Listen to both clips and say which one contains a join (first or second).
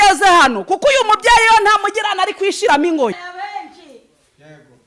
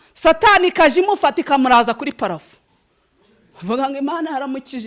first